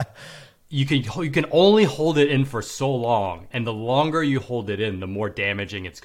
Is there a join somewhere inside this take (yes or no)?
yes